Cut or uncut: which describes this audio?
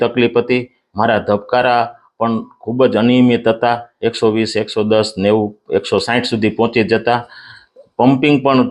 uncut